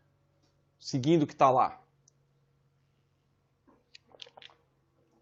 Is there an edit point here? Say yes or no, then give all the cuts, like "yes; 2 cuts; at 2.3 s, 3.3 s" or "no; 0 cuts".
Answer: no; 0 cuts